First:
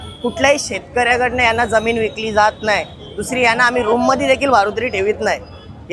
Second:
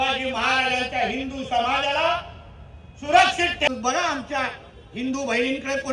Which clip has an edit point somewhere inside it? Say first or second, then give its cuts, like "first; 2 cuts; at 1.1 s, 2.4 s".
second; 1 cut; at 3.7 s